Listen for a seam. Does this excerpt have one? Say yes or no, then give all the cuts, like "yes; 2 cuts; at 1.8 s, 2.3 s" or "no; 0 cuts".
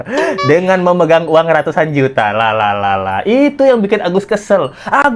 no; 0 cuts